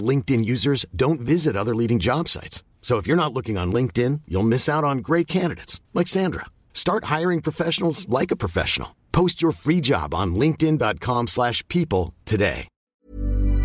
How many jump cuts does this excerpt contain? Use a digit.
1